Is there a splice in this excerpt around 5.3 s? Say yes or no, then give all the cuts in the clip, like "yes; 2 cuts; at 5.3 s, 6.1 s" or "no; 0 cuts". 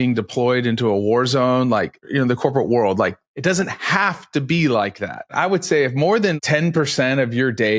yes; 4 cuts; at 2.1 s, 3.3 s, 5.3 s, 6.3 s